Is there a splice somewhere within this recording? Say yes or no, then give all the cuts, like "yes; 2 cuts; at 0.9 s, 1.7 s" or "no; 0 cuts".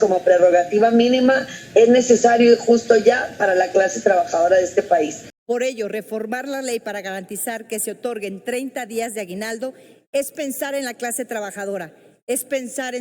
yes; 1 cut; at 5.3 s